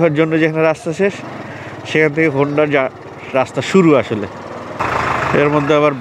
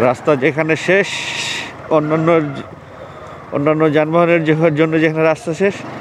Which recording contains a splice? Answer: first; 1 cut; at 4.8 s

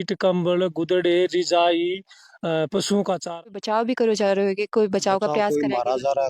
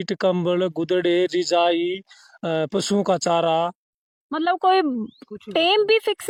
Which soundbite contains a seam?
first; 1 cut; at 3.5 s

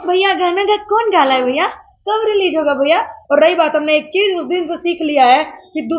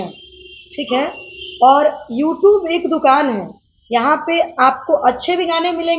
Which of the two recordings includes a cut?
first; 1 cut; at 3.1 s

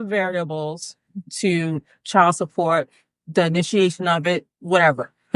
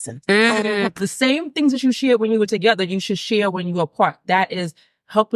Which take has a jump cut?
second; 1 cut; at 0.9 s

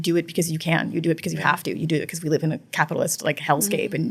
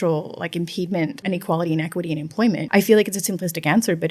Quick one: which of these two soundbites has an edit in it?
second; 2 cuts; at 1.2 s, 2.7 s

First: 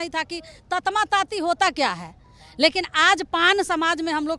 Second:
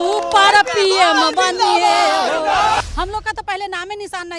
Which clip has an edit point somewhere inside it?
second; 1 cut; at 2.8 s

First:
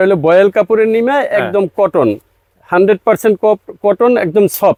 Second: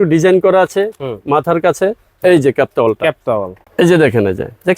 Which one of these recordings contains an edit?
second; 1 cut; at 3.6 s

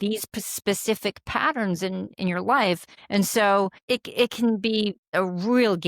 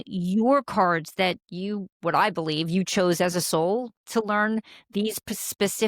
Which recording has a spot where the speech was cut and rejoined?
first; 3 cuts; at 2.9 s, 3.8 s, 5.1 s

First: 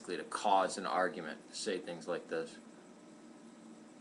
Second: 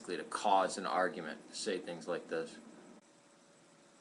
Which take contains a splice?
first; 1 cut; at 3.0 s

